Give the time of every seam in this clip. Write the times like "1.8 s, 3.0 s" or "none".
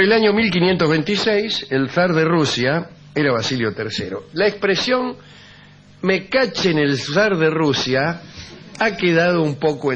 8.8 s